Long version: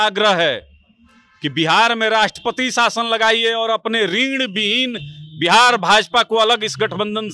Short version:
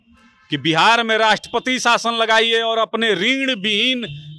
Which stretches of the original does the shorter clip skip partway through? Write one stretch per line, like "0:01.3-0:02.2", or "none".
none